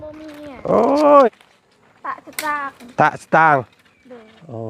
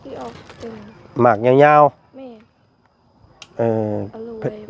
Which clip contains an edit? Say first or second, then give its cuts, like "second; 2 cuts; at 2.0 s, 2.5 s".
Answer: first; 1 cut; at 1.3 s